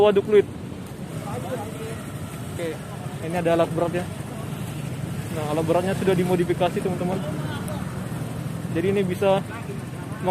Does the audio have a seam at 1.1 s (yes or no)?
yes